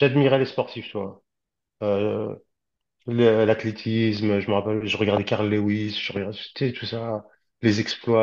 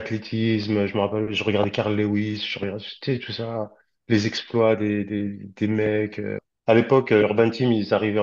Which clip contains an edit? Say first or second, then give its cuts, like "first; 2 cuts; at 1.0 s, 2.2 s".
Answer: second; 1 cut; at 6.5 s